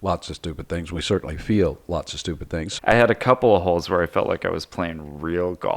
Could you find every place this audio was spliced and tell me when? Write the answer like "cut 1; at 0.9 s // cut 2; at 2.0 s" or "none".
cut 1; at 2.6 s